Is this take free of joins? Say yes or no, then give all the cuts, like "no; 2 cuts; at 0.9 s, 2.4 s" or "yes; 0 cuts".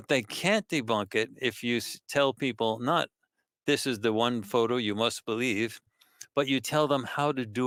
yes; 0 cuts